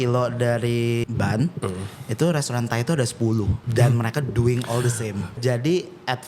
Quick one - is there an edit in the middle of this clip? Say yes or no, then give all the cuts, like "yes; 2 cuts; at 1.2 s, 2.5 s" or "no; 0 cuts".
yes; 3 cuts; at 1.0 s, 3.6 s, 5.3 s